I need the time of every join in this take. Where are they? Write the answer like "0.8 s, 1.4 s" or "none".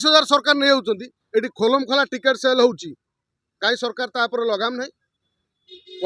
none